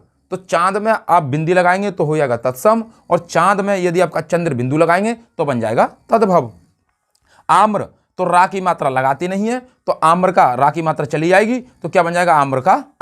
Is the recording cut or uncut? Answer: uncut